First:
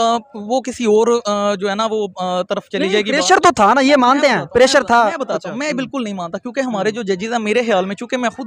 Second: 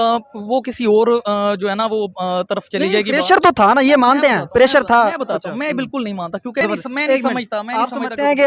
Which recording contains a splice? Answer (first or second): second